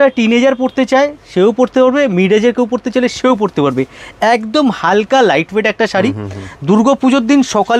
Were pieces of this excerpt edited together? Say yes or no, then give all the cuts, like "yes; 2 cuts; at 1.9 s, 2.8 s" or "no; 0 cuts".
no; 0 cuts